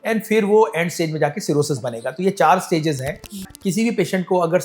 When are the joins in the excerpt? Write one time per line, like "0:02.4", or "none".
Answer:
0:03.5